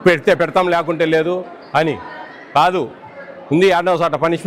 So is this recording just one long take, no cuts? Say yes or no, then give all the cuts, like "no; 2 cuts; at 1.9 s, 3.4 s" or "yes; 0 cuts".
yes; 0 cuts